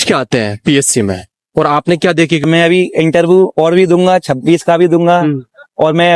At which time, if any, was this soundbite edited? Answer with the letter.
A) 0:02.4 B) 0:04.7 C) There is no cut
A